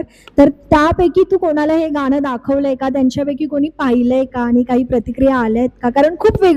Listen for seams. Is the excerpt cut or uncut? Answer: uncut